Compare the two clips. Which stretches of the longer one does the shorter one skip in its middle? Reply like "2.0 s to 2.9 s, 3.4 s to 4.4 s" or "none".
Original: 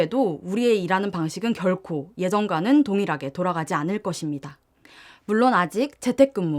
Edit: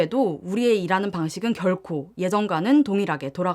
none